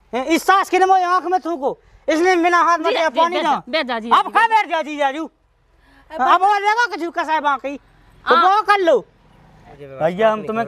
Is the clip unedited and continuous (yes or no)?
no